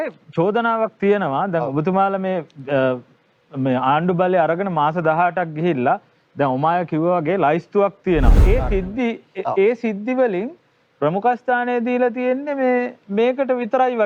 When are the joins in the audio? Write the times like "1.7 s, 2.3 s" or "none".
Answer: 8.4 s